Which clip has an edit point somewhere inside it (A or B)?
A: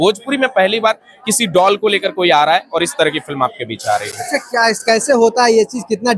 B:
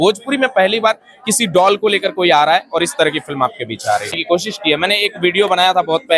B